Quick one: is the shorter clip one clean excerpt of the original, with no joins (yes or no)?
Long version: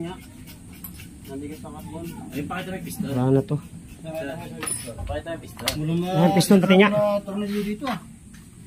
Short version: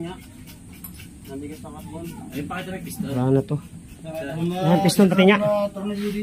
no